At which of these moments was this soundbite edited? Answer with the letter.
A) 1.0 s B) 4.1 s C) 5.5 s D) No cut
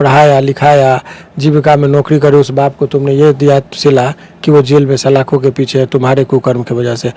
D